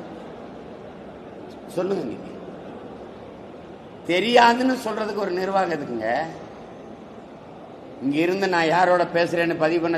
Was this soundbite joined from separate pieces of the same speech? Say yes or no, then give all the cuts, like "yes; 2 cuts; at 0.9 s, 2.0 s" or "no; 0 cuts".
no; 0 cuts